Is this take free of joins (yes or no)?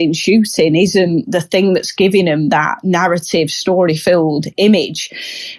yes